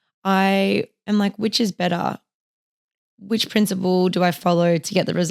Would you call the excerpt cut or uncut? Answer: uncut